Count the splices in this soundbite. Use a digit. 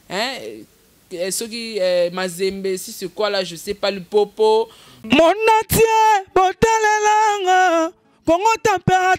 1